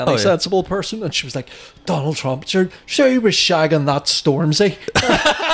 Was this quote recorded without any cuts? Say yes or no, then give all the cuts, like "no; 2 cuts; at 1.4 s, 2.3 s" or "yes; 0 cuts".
yes; 0 cuts